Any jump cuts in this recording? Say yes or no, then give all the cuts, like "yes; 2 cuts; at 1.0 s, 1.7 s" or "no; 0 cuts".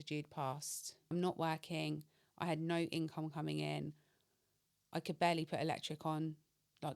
yes; 1 cut; at 1.1 s